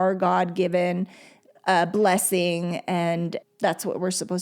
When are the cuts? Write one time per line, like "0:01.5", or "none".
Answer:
0:03.4